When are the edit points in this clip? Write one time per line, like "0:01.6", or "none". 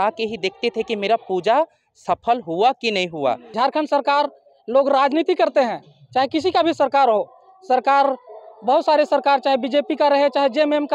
0:03.5